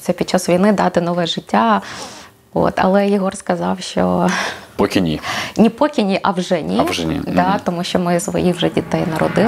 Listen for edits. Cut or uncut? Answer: cut